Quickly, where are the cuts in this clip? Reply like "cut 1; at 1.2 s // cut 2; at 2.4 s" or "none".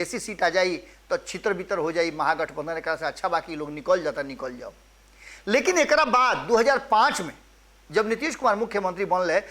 none